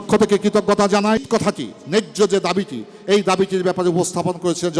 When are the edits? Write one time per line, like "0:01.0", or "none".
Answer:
0:01.2